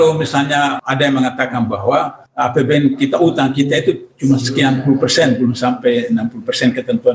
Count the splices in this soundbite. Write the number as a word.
two